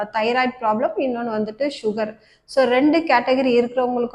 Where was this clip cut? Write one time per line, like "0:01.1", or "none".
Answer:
none

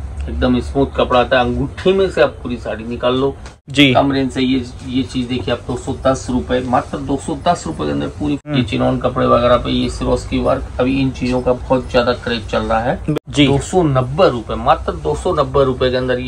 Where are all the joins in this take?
0:03.6
0:08.4
0:13.1

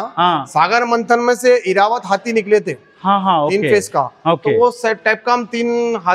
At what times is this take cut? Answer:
none

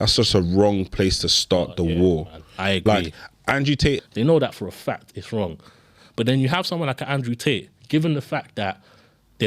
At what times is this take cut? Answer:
0:04.0

